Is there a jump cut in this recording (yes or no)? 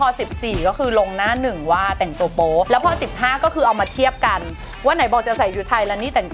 no